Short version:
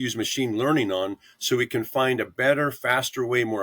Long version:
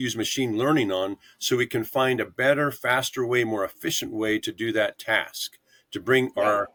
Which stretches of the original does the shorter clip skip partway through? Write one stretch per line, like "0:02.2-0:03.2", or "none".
none